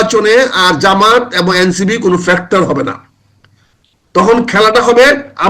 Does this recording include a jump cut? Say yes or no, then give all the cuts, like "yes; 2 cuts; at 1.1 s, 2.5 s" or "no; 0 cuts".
no; 0 cuts